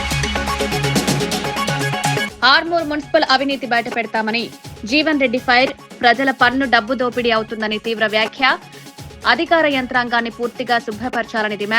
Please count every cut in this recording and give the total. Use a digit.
1